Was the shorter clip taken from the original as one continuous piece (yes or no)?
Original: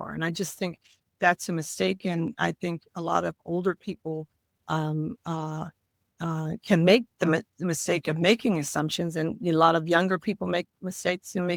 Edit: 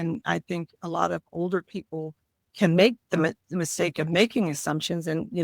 no